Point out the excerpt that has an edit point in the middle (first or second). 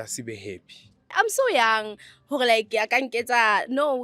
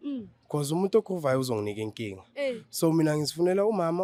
first